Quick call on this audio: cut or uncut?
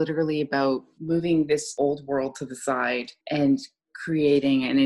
cut